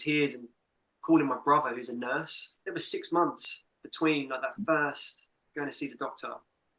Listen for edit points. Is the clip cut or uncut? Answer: cut